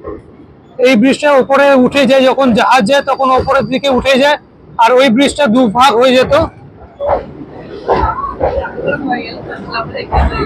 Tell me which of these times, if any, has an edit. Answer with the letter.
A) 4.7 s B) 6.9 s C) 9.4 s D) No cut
B